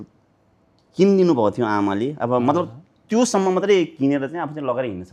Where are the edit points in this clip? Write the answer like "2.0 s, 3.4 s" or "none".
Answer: none

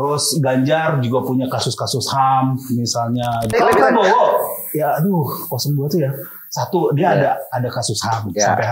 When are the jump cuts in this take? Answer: 3.5 s

